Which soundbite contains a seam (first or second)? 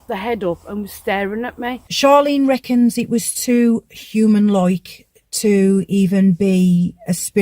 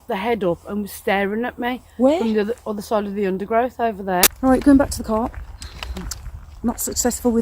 first